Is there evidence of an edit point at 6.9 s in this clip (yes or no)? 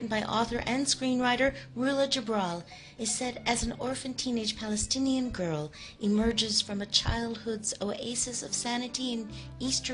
no